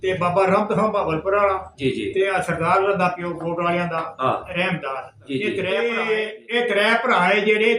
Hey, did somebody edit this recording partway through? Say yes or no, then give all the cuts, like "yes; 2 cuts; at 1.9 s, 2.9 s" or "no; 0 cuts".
yes; 1 cut; at 5.8 s